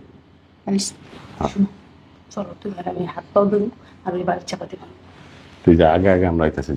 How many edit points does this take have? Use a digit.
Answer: 0